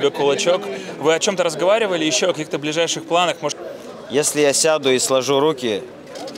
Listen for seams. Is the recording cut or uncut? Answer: cut